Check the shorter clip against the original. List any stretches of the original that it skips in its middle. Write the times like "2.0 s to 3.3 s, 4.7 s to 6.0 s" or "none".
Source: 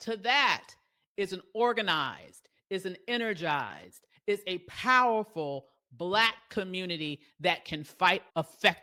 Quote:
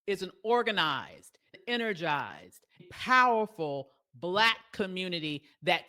2.6 s to 2.9 s, 4.2 s to 4.6 s